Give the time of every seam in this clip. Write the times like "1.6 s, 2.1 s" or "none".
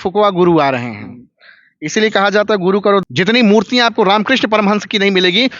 3.0 s